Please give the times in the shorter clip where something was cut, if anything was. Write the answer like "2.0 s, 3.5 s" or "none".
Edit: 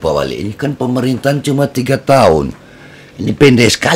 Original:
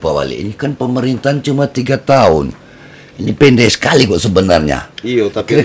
none

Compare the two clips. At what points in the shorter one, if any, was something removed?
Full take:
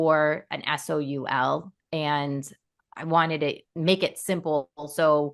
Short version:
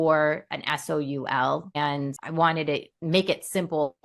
1.8 s

